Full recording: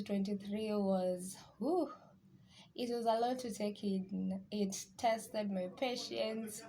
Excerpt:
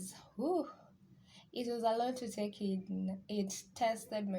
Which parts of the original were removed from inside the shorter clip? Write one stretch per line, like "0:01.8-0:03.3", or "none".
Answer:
none